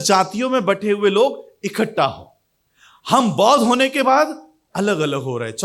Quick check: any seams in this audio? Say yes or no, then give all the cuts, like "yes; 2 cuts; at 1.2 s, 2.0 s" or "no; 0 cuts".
no; 0 cuts